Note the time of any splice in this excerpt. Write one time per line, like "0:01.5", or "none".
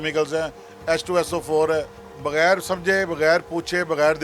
0:02.0